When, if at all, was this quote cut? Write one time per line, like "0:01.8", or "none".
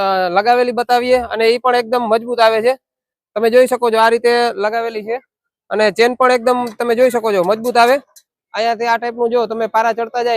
0:08.3